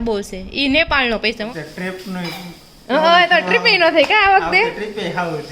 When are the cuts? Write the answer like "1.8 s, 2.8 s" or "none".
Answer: 1.5 s